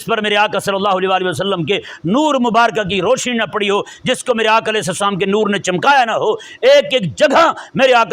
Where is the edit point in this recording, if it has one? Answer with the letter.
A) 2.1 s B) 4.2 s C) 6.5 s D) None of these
D